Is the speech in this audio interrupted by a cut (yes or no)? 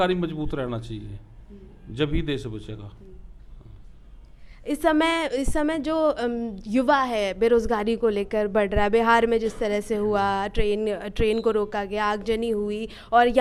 no